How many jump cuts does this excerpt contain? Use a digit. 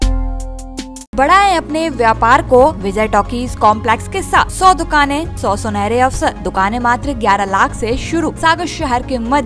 6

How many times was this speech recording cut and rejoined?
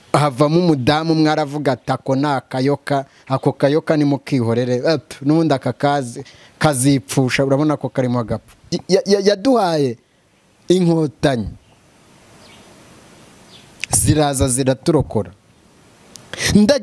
1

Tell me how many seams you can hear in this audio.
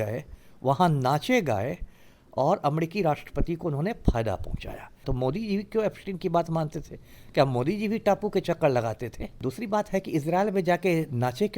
2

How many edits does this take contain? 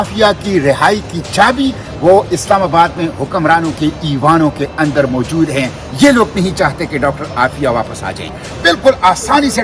1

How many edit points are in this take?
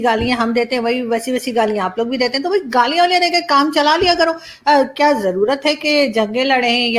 0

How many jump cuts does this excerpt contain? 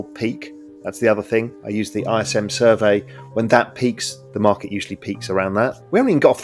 0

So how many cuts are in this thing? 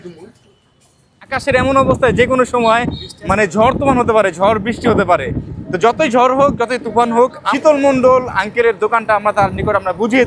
2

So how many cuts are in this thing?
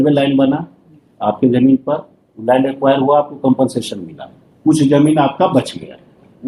0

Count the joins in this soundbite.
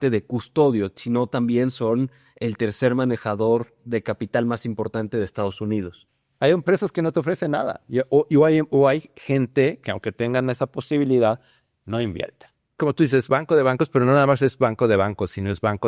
2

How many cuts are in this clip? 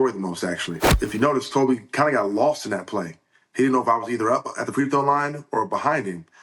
1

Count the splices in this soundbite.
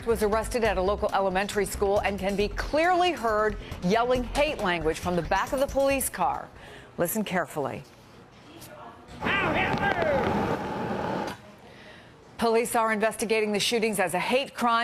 1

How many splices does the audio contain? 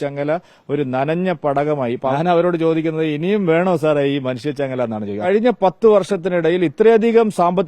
2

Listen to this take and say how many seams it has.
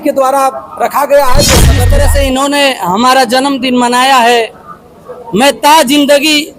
1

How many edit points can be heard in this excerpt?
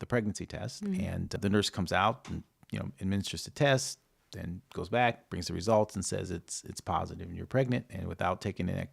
1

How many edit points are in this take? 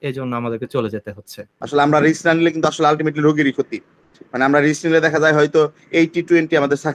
1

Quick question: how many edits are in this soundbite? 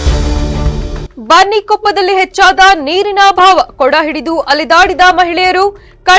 1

